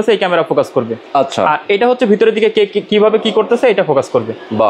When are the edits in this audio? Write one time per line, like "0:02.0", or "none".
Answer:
none